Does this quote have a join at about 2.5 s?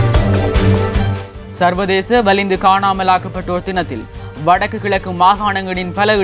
no; 1 cut; at 1.2 s

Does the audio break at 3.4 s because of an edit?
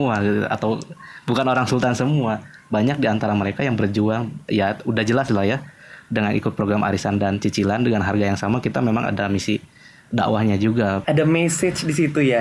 no; 1 cut; at 11.0 s

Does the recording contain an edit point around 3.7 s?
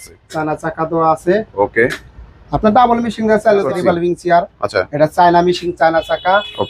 yes; 1 cut; at 3.7 s

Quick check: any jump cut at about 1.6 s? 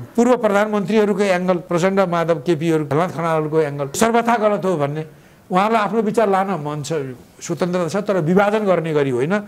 yes; 3 cuts; at 1.6 s, 2.9 s, 4.0 s

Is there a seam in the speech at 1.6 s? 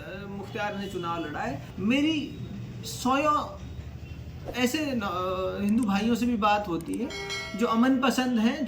yes; 1 cut; at 1.6 s

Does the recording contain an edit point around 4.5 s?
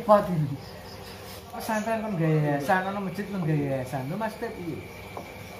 no; 1 cut; at 1.6 s

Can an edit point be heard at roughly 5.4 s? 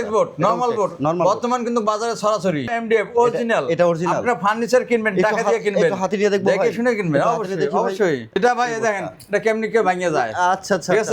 no; 2 cuts; at 2.7 s, 8.4 s

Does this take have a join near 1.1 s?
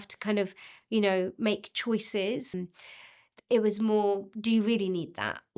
no; 1 cut; at 2.6 s

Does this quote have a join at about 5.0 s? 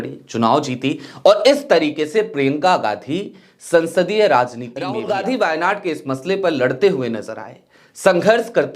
yes; 1 cut; at 5.0 s

